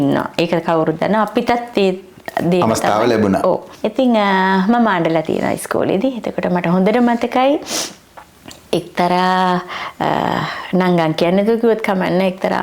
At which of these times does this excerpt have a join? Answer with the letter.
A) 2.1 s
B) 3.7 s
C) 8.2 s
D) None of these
B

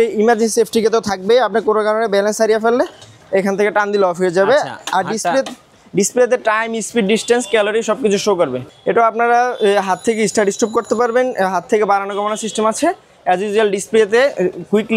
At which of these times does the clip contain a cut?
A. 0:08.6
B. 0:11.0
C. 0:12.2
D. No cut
A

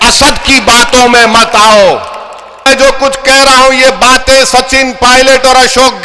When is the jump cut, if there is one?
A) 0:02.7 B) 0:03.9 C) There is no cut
A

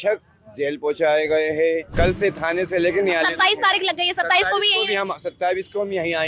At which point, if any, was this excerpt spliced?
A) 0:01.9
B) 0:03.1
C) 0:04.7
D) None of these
A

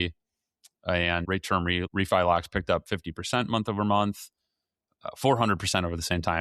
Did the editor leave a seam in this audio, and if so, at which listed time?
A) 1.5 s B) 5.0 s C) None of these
A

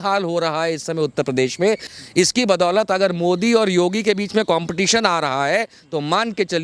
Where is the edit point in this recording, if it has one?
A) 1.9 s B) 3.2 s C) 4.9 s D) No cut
D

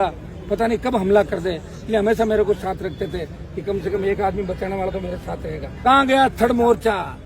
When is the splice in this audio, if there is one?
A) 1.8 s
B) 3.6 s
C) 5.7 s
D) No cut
C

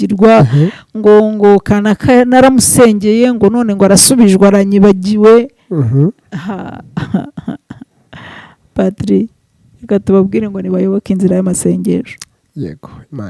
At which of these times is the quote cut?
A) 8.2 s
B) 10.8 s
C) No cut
C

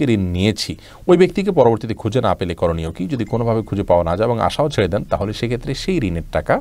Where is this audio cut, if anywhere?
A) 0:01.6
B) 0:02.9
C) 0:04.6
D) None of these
D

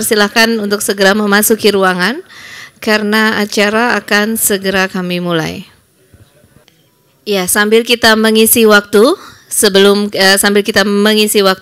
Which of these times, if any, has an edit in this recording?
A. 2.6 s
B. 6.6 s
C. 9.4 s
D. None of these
B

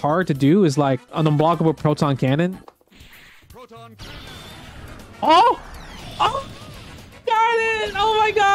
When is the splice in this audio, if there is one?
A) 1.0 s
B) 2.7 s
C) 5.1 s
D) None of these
B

